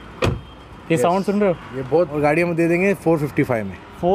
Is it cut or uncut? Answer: cut